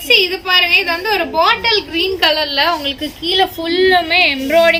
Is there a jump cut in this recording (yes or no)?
no